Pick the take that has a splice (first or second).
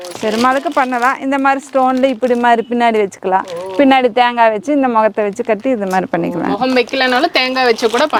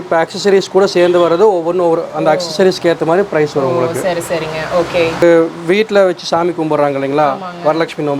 second